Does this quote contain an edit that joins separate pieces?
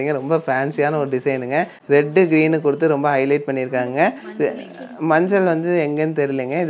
no; 0 cuts

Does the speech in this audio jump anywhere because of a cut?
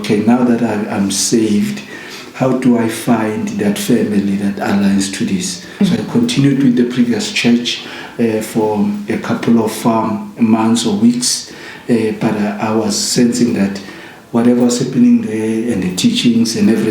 no; 0 cuts

